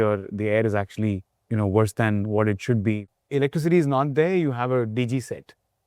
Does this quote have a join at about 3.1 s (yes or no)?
yes